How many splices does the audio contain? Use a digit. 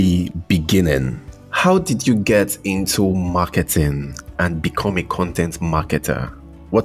0